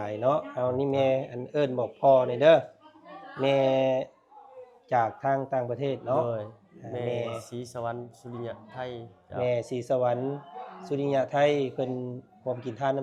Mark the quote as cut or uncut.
uncut